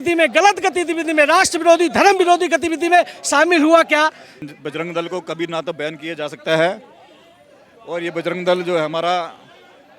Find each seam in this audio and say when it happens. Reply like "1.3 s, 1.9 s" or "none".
4.4 s

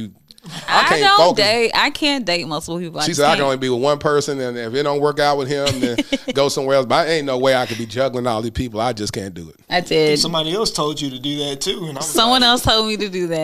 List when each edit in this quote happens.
9.6 s

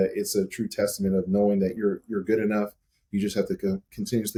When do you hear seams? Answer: none

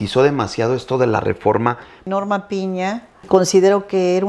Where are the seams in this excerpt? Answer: 2.1 s, 3.3 s

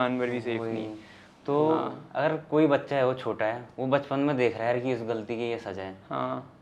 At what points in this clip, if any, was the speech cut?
2.0 s

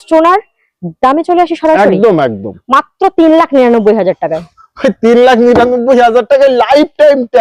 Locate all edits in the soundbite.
none

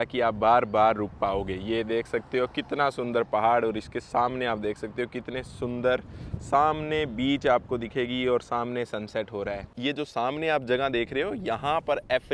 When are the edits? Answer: 9.7 s

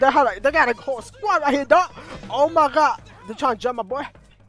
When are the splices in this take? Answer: 3.3 s

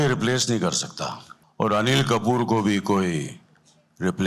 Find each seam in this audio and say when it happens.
1.3 s

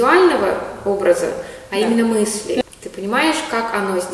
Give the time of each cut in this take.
2.6 s

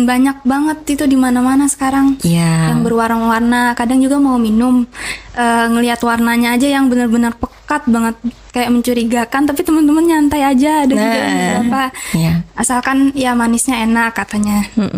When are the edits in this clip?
none

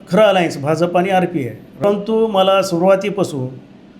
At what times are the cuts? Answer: 1.8 s

